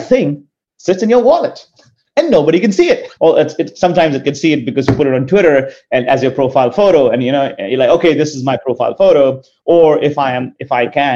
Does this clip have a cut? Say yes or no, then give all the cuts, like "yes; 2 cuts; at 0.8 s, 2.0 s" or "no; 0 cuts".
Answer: yes; 1 cut; at 3.1 s